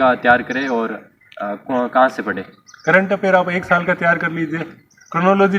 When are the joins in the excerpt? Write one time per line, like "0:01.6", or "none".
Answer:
none